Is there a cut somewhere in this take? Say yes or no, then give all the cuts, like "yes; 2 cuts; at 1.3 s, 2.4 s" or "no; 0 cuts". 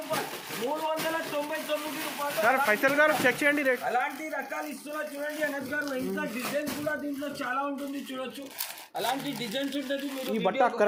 no; 0 cuts